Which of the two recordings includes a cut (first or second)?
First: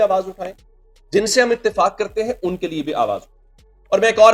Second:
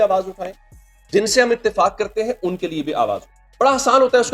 second